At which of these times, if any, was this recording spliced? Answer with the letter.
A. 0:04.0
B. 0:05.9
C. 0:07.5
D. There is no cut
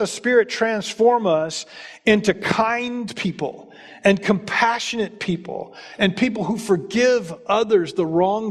D